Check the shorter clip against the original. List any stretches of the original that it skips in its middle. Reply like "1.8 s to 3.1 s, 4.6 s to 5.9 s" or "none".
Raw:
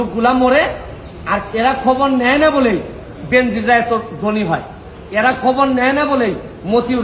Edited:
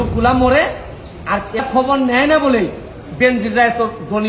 1.6 s to 1.7 s